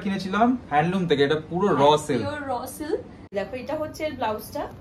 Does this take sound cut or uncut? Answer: cut